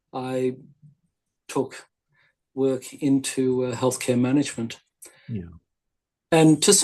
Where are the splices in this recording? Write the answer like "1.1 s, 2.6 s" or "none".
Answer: none